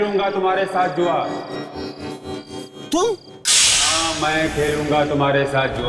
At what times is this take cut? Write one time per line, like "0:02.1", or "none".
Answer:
0:03.7